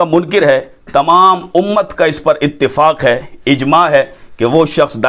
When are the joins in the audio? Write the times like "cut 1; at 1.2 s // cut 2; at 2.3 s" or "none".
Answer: none